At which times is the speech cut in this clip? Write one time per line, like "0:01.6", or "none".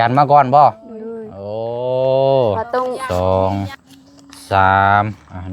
0:03.0